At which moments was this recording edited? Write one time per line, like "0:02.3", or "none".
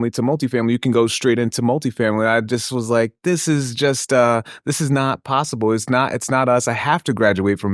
none